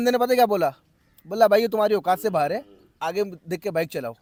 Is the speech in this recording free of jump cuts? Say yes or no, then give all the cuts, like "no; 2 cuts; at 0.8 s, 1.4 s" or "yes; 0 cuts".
yes; 0 cuts